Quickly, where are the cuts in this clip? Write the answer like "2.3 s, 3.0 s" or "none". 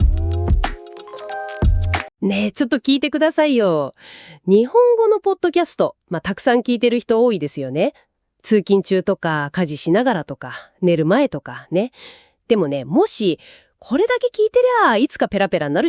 2.1 s